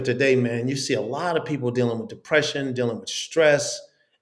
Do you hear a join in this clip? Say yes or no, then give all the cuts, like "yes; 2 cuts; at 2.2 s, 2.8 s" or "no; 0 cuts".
no; 0 cuts